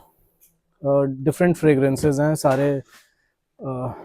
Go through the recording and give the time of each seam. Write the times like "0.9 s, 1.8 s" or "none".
none